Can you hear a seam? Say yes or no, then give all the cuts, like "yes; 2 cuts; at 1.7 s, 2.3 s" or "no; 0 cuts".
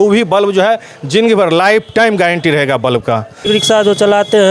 yes; 1 cut; at 3.4 s